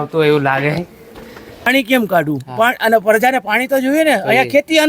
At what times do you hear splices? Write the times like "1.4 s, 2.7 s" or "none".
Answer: 1.7 s